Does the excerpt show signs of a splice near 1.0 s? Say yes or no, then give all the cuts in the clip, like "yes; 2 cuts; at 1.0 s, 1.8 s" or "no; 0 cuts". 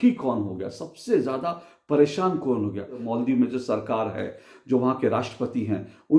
no; 1 cut; at 3.1 s